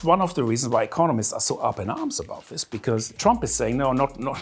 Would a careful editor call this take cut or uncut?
cut